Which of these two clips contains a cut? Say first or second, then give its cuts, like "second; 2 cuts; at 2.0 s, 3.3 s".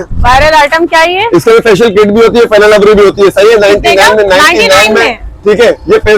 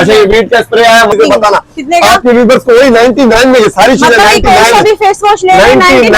second; 1 cut; at 1.1 s